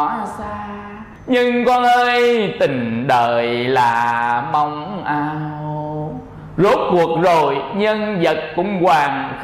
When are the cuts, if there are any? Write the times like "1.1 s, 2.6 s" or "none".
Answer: 1.1 s